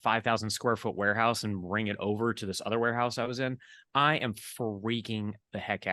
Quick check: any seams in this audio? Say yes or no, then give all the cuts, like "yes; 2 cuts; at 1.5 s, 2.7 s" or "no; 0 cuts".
no; 0 cuts